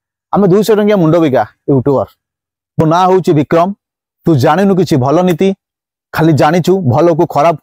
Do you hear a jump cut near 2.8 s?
yes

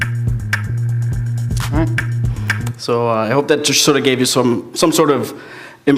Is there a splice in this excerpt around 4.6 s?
no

